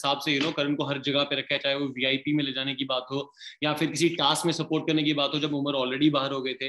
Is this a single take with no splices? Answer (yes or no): yes